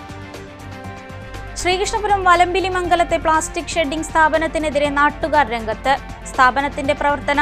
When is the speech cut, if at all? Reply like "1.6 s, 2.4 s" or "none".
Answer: 1.3 s

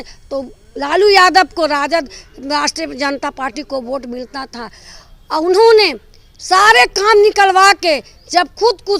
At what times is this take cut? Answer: none

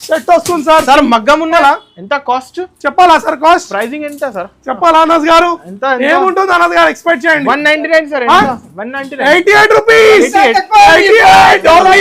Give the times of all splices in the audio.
1.6 s

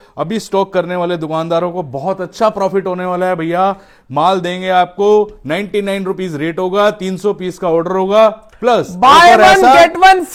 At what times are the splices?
none

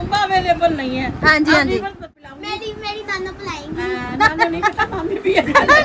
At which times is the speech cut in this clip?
2.0 s, 4.3 s

